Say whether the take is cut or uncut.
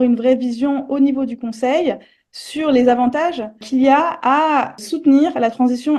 cut